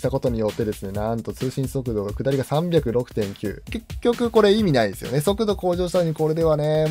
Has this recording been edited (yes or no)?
yes